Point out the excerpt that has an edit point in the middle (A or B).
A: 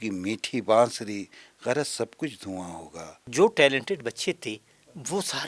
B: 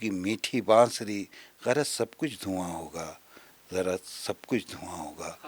A